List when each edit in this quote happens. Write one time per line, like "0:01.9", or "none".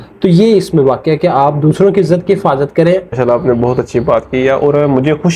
0:03.2